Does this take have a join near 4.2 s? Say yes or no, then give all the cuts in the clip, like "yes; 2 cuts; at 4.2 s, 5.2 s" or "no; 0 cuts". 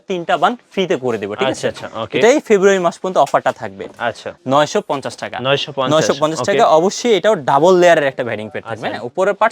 yes; 1 cut; at 4.2 s